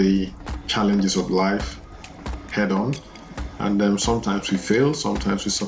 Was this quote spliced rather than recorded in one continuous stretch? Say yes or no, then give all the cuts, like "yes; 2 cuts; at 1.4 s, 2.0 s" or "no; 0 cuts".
no; 0 cuts